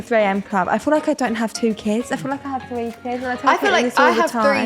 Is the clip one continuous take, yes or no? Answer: yes